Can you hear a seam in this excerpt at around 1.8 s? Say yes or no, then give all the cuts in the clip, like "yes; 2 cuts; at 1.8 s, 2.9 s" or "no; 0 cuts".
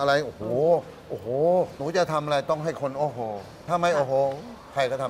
yes; 2 cuts; at 1.8 s, 3.6 s